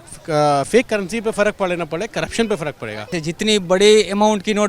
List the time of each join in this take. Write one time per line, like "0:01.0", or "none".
0:03.1